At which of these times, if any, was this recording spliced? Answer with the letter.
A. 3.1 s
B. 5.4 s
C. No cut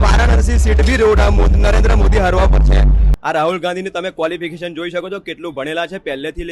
A